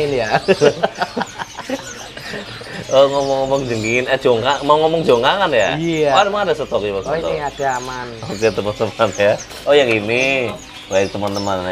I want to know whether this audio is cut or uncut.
uncut